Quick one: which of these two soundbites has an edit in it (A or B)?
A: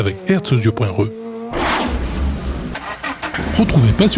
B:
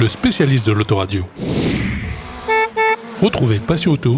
A